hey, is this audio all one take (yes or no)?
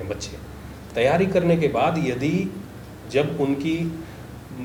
yes